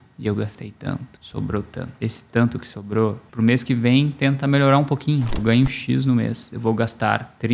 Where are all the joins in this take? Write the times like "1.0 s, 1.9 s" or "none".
1.2 s, 1.9 s, 3.2 s, 5.4 s

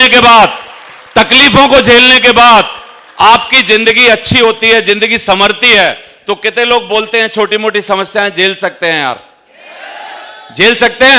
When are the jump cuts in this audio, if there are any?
none

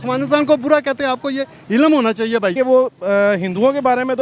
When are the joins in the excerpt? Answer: 2.5 s

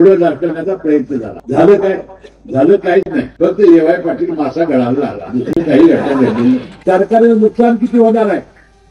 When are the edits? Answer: 1.3 s, 3.2 s, 6.7 s

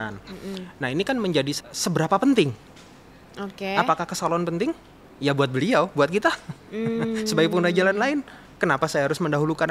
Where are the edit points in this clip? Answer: 1.6 s

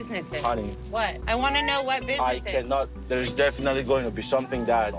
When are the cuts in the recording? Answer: 1.2 s

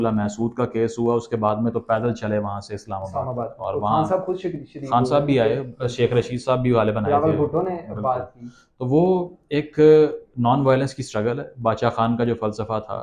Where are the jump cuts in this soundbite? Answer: none

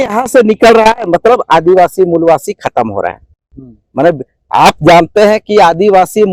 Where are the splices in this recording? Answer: none

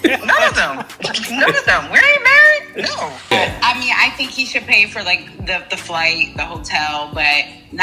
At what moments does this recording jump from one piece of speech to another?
3.2 s

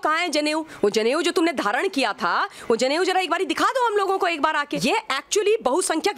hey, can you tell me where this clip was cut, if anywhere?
4.7 s

